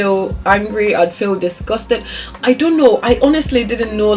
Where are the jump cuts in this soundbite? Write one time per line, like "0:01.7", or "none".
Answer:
none